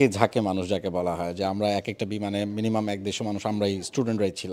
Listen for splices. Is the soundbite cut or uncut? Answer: uncut